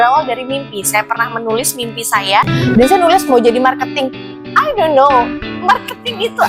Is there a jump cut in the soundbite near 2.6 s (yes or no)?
yes